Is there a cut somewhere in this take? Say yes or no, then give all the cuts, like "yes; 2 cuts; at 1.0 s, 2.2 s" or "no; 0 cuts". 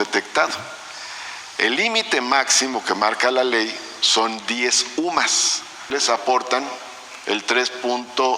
yes; 1 cut; at 5.9 s